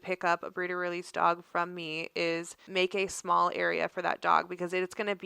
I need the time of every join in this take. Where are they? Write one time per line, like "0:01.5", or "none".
0:02.7